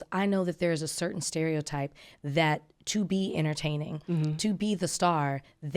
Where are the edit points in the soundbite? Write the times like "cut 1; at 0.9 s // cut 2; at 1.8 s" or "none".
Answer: none